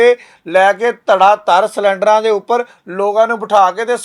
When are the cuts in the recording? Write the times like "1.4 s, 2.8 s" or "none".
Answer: none